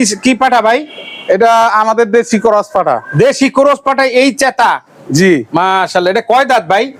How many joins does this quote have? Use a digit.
0